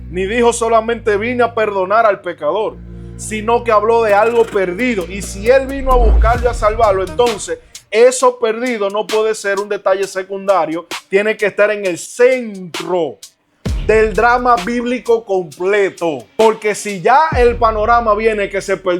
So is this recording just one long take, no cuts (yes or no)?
no